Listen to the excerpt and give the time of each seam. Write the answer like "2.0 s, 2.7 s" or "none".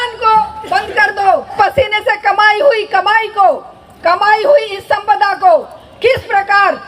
1.5 s